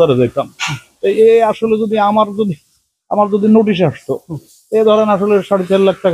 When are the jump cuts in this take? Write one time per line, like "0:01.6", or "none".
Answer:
none